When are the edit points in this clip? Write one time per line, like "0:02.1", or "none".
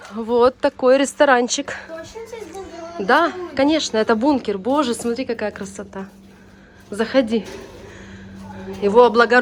none